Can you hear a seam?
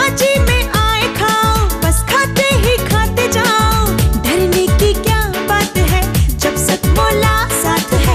no; 0 cuts

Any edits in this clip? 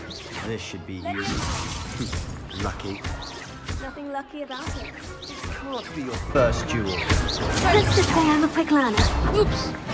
no; 0 cuts

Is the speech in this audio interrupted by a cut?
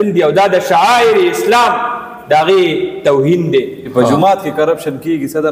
yes; 1 cut; at 3.8 s

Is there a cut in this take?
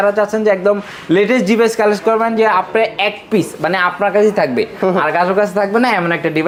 no; 0 cuts

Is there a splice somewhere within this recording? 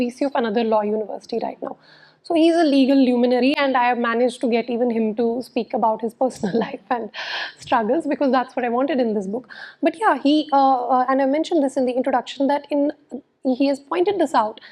no; 0 cuts

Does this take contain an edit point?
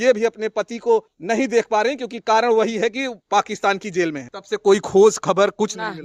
yes; 2 cuts; at 1.1 s, 4.3 s

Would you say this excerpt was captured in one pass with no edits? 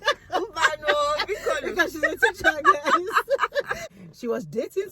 no; 1 cut; at 3.8 s

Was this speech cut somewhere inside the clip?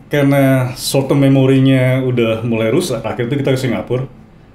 yes; 1 cut; at 3.0 s

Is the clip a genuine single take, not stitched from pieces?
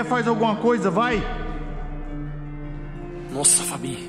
yes; 0 cuts

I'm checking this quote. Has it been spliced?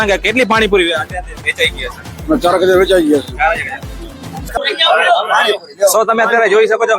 yes; 1 cut; at 4.5 s

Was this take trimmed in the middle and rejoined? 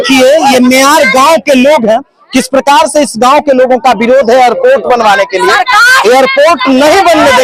no; 0 cuts

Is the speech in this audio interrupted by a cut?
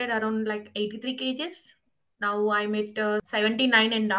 yes; 1 cut; at 3.2 s

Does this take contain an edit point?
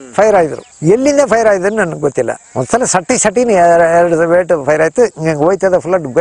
yes; 1 cut; at 2.4 s

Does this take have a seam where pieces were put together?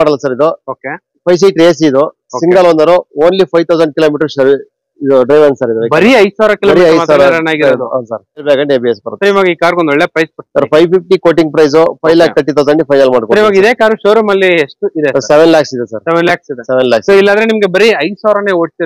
yes; 1 cut; at 8.4 s

